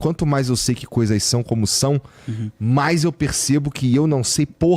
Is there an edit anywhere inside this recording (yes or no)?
no